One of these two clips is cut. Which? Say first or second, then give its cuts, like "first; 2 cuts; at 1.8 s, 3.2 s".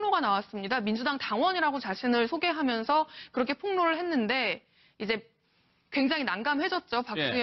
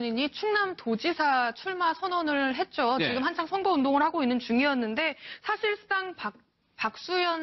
first; 1 cut; at 5.9 s